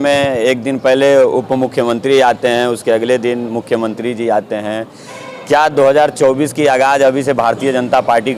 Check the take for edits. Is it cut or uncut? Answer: uncut